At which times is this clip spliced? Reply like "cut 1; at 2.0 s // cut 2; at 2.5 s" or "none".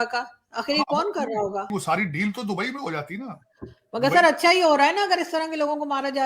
none